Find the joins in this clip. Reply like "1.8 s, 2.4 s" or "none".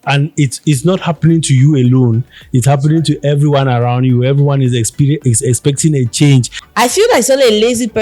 6.6 s